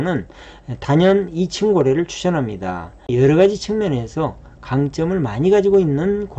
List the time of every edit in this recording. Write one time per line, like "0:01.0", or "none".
0:03.0